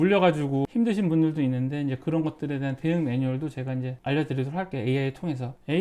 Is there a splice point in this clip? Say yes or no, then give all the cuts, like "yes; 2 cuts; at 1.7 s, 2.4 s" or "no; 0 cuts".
no; 0 cuts